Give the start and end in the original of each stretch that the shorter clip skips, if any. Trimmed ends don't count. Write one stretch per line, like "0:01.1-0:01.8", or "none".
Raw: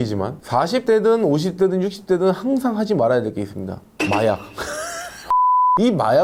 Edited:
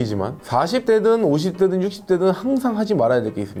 none